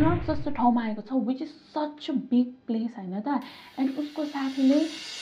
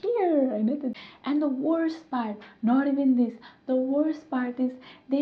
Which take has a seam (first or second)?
second